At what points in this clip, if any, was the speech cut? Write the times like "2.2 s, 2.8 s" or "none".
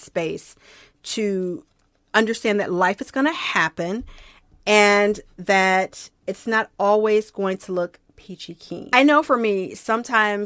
8.9 s